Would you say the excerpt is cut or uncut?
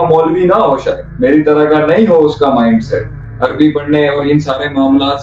cut